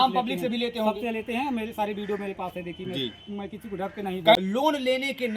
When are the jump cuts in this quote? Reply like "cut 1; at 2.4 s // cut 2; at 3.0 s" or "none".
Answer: cut 1; at 4.4 s

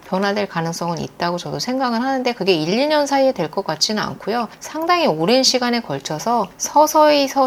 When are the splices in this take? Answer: none

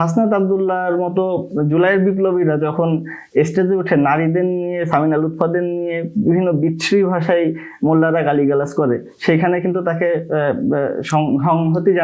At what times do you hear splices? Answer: none

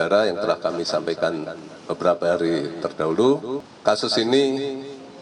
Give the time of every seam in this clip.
cut 1; at 3.7 s

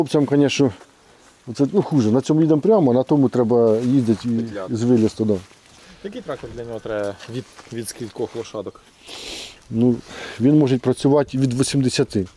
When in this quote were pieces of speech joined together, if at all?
none

